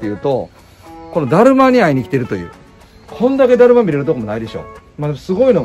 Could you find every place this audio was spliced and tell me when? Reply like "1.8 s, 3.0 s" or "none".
none